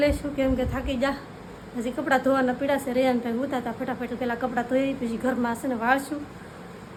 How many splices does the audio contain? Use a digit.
0